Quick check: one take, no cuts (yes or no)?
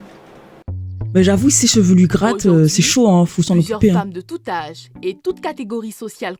yes